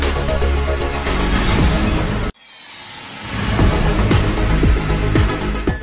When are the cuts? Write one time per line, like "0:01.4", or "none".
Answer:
0:02.1